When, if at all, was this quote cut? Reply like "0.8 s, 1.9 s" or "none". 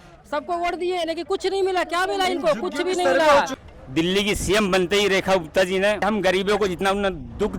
3.6 s, 6.0 s